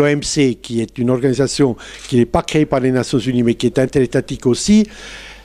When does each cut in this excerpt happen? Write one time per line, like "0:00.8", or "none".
none